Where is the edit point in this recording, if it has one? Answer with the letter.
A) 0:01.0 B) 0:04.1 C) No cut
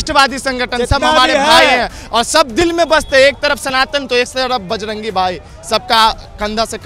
C